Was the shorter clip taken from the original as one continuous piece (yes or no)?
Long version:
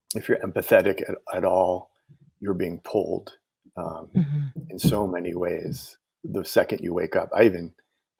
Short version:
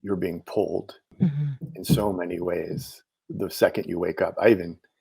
no